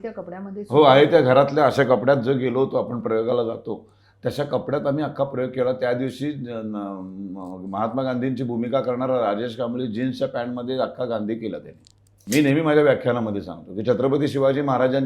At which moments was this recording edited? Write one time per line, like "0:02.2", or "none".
0:12.2

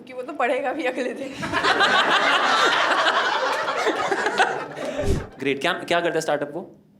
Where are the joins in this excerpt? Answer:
0:05.1

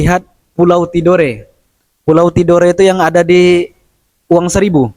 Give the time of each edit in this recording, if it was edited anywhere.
none

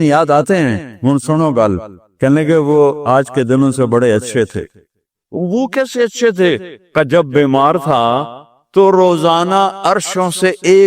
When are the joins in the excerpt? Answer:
0:05.4

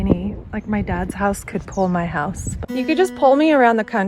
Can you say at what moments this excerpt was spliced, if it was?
0:02.5

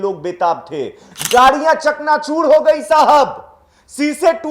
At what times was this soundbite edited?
0:01.1

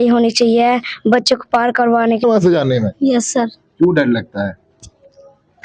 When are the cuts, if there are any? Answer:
0:02.2

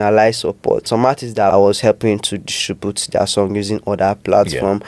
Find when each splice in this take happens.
0:01.0

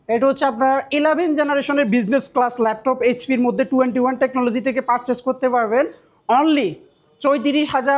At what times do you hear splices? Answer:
none

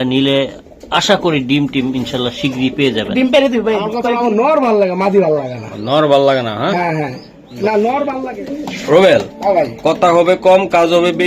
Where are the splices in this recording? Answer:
0:04.0
0:08.1

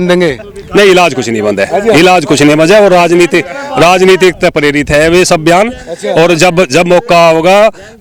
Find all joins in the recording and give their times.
none

